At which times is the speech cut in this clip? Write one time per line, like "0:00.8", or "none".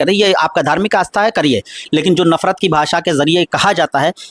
0:01.8